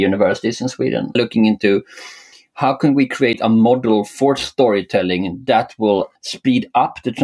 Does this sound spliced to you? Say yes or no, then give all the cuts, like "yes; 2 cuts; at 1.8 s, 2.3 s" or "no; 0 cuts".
yes; 2 cuts; at 1.2 s, 6.1 s